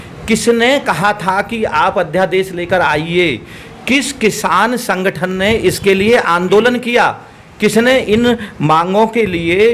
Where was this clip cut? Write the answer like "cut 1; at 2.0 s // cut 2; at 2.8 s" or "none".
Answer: none